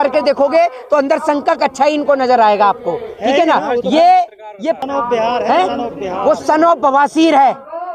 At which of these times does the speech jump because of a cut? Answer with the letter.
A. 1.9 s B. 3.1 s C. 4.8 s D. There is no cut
C